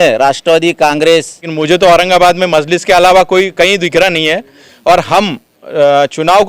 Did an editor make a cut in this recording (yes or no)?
yes